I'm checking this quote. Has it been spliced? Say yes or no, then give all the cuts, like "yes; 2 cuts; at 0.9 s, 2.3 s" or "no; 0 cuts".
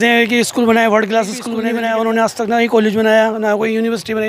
yes; 1 cut; at 1.5 s